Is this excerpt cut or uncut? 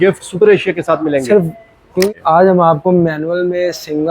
cut